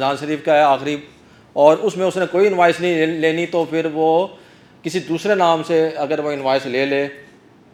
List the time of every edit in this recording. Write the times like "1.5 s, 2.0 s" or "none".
none